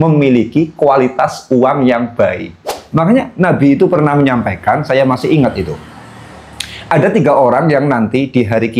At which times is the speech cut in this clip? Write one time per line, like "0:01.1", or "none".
0:02.7